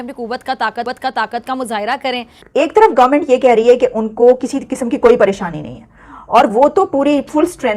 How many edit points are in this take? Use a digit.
1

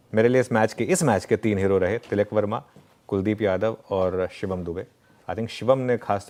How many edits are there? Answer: 0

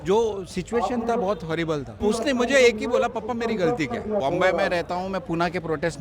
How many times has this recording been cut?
2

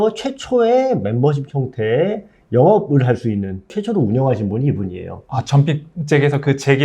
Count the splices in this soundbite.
1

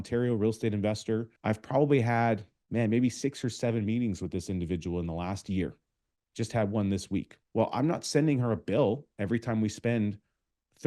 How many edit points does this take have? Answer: 3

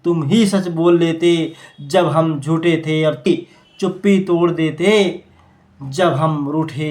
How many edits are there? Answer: 1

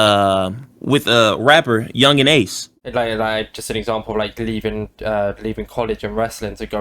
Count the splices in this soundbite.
1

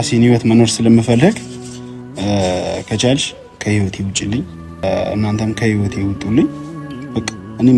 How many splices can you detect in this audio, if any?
1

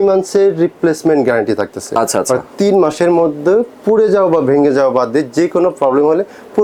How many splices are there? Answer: 0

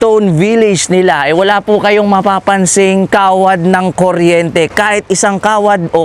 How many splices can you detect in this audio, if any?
0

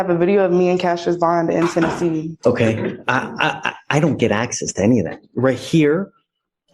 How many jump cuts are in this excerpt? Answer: 1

